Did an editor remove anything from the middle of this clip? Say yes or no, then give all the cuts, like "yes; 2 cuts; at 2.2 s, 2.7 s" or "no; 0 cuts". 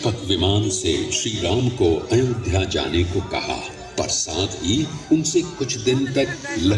no; 0 cuts